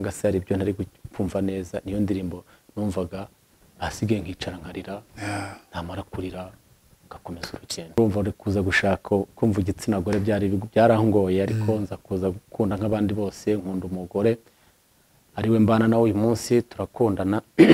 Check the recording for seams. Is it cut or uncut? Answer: cut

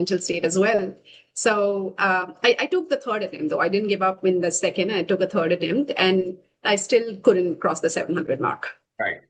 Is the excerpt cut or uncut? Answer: uncut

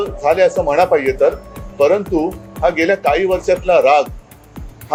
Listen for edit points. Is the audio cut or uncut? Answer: uncut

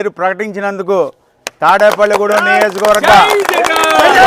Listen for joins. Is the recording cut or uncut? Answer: uncut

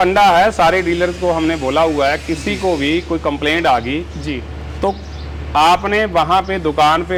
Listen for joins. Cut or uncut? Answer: uncut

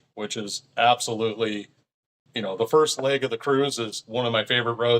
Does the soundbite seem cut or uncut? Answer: cut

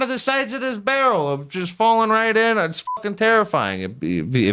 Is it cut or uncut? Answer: uncut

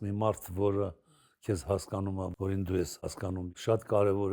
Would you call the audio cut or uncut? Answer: cut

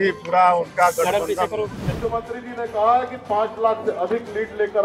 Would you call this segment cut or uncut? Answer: cut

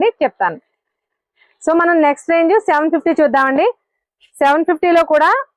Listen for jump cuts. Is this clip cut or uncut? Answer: uncut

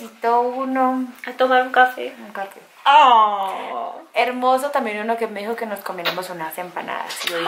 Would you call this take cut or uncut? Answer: uncut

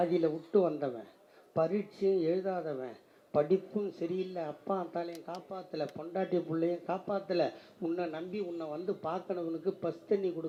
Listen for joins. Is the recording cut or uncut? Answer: uncut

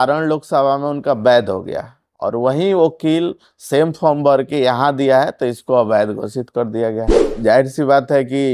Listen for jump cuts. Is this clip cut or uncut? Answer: cut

